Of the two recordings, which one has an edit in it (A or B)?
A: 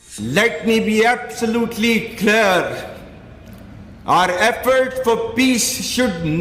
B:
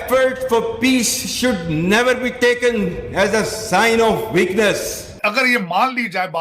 B